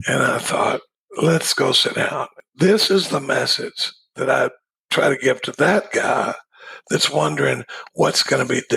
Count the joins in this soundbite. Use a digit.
2